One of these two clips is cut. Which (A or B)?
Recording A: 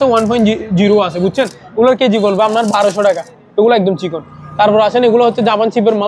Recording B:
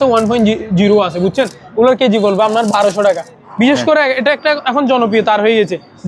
B